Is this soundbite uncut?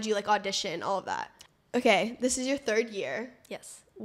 no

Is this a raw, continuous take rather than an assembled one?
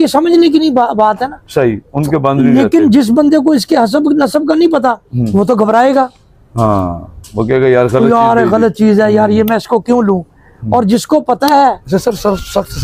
no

